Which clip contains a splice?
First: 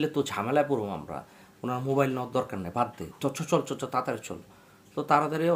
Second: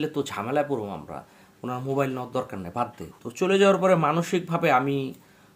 second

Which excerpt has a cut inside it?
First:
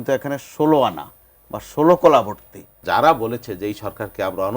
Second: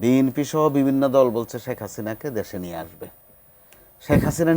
first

